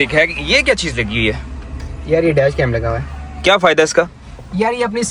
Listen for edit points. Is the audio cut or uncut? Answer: uncut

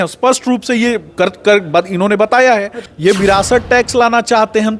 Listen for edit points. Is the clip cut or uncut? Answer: cut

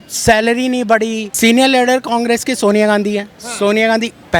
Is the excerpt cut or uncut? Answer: cut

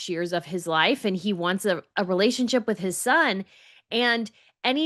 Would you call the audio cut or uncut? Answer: uncut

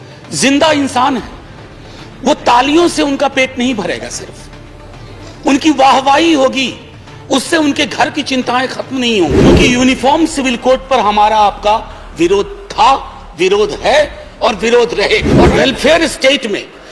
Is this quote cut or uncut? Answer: cut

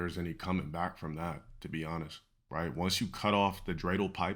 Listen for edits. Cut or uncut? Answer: uncut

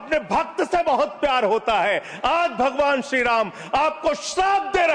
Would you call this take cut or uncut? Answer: uncut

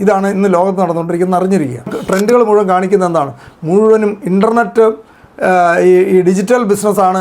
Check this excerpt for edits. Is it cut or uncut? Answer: cut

